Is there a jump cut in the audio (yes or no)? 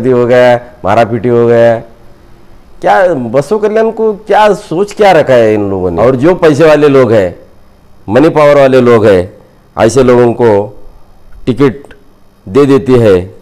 yes